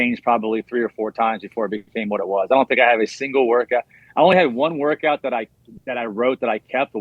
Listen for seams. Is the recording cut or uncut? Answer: uncut